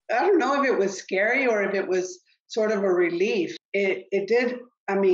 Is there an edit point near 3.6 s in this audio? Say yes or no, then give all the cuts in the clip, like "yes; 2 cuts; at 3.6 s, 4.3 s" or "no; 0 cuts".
yes; 1 cut; at 3.6 s